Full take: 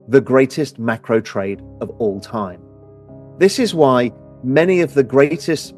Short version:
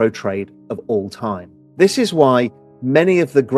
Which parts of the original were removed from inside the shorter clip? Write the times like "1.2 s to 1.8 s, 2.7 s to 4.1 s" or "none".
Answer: 2.7 s to 3.2 s